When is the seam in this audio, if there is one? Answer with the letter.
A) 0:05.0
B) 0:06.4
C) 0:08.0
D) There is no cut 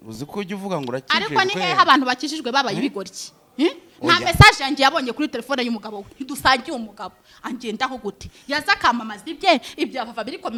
D